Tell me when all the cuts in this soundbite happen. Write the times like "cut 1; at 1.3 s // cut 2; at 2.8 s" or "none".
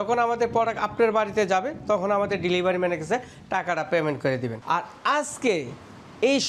none